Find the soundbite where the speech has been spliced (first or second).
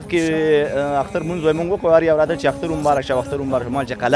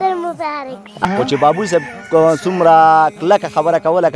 second